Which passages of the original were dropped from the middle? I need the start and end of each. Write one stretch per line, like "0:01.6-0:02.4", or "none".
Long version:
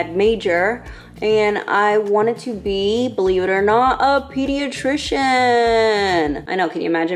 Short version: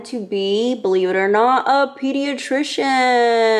none